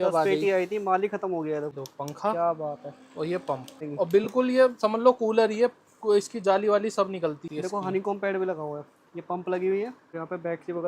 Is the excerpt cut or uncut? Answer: cut